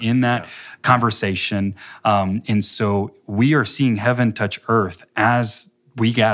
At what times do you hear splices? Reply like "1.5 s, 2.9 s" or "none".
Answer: none